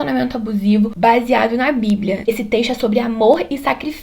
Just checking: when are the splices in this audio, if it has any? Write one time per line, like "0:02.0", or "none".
0:00.9
0:02.3